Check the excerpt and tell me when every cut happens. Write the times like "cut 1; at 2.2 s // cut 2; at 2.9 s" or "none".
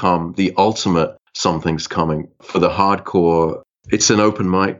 cut 1; at 3.7 s